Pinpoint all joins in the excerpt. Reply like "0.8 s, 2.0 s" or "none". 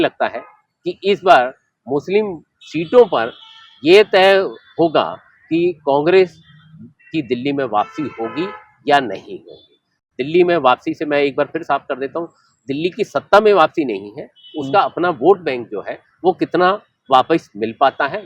none